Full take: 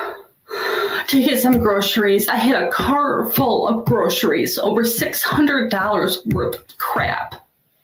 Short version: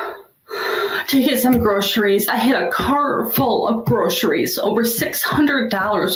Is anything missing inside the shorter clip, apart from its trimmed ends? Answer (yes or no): no